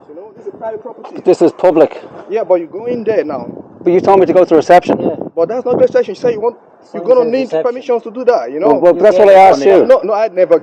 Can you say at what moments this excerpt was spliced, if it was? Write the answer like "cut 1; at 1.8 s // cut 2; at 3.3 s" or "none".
none